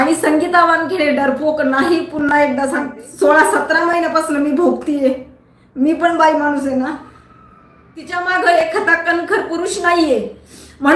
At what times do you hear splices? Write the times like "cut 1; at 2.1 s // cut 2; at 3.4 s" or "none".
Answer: cut 1; at 3.0 s // cut 2; at 8.2 s